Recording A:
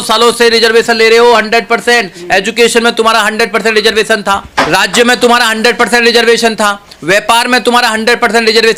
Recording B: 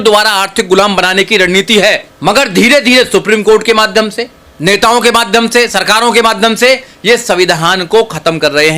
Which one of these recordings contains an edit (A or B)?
B